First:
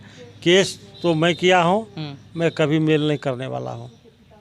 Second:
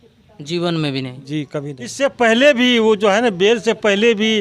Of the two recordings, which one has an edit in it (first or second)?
second